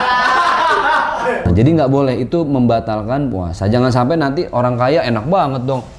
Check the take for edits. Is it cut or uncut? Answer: cut